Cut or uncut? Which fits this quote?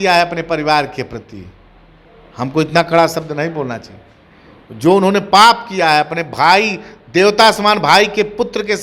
uncut